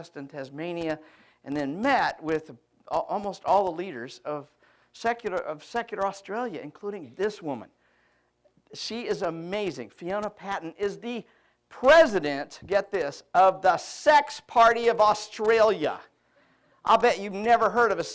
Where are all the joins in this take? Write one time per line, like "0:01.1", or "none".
0:09.8